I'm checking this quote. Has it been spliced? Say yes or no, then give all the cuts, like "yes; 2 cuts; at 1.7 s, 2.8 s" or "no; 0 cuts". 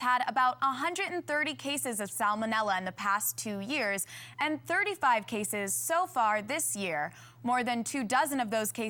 no; 0 cuts